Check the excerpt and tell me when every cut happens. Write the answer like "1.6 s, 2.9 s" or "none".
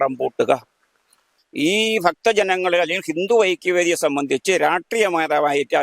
1.2 s